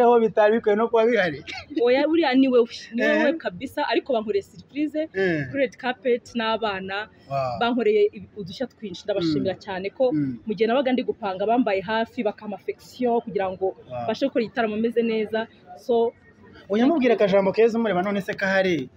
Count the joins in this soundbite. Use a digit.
0